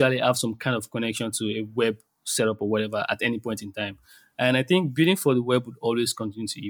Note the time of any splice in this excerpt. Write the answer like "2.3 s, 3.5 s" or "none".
none